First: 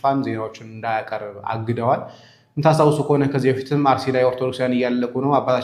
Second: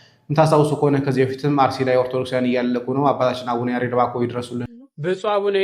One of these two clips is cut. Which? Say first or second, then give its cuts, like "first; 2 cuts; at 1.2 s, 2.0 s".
second; 1 cut; at 4.7 s